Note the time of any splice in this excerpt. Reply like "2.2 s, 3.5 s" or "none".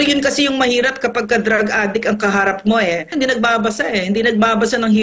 3.1 s